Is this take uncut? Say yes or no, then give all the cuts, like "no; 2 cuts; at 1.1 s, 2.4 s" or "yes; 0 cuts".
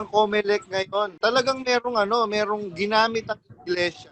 no; 1 cut; at 1.1 s